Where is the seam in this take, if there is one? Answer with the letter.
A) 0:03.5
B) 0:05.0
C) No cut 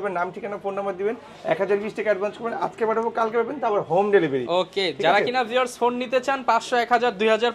C